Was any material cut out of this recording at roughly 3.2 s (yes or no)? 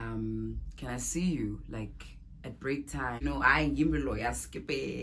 yes